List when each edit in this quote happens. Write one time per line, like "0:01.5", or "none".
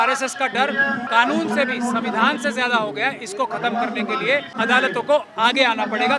0:01.0
0:04.5